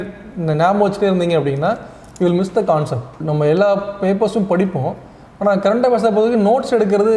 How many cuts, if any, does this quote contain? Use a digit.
1